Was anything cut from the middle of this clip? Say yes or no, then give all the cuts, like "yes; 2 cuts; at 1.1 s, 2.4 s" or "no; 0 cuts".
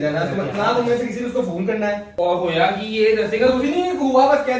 yes; 1 cut; at 2.1 s